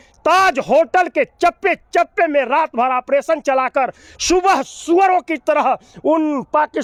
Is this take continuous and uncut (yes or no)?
yes